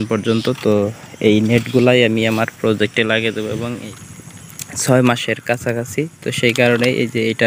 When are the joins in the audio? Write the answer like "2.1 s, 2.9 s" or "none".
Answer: 4.0 s